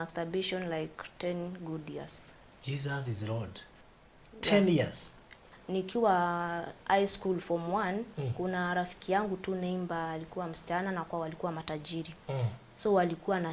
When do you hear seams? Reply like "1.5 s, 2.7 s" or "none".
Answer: 5.5 s